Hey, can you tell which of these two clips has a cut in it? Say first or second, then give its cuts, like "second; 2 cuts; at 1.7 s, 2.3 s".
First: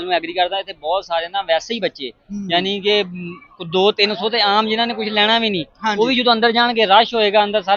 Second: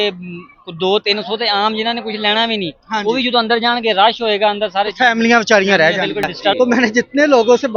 second; 1 cut; at 6.5 s